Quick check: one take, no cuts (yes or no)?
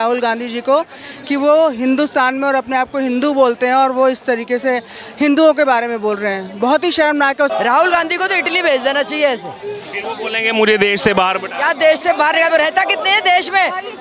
no